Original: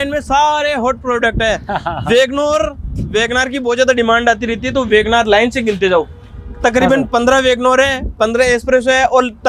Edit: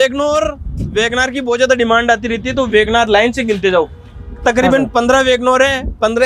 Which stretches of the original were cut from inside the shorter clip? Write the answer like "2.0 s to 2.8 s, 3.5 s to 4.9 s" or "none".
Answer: none